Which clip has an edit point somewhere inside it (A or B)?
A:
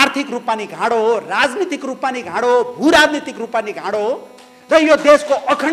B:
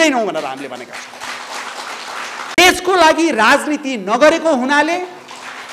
B